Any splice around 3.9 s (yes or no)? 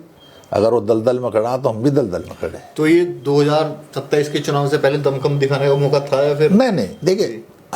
no